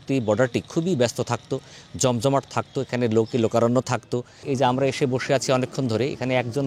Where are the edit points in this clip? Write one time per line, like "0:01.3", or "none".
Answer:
0:04.4